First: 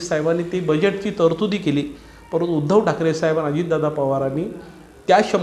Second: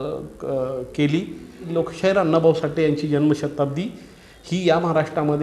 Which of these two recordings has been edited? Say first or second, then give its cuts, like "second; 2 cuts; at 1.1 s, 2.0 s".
second; 1 cut; at 1.7 s